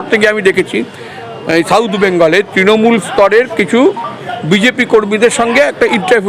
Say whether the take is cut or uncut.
uncut